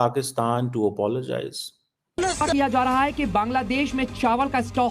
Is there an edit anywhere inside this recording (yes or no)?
yes